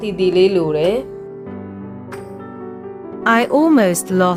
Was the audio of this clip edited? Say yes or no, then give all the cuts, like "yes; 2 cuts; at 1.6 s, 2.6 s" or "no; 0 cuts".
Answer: no; 0 cuts